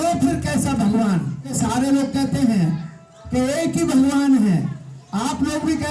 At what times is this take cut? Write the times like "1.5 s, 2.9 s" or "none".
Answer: 1.5 s